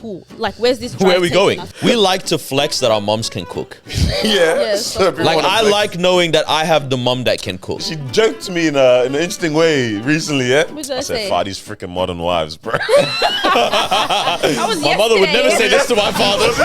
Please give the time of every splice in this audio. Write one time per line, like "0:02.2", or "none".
0:01.7
0:07.8